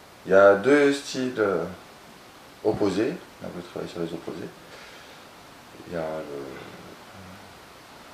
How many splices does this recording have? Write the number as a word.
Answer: one